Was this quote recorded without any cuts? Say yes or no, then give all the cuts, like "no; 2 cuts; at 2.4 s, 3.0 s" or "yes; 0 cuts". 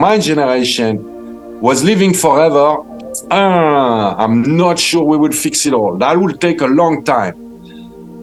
yes; 0 cuts